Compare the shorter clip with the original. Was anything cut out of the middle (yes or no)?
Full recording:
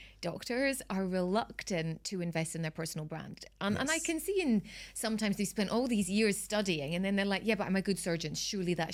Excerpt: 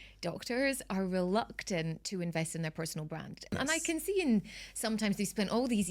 yes